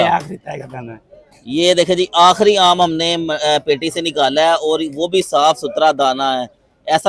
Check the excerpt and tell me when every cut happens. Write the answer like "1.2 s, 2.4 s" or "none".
none